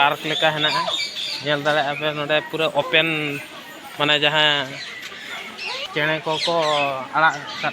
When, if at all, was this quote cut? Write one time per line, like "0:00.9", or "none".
0:05.9